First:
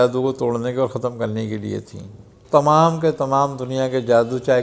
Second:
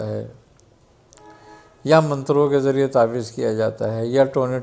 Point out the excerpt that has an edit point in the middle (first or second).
first